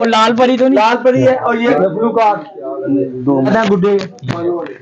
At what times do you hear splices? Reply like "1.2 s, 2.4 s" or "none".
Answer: 1.7 s, 3.5 s